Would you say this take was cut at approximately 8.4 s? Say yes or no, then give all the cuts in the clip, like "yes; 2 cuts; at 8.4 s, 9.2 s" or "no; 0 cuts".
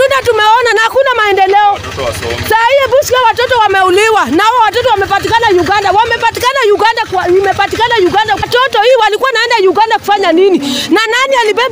yes; 1 cut; at 8.4 s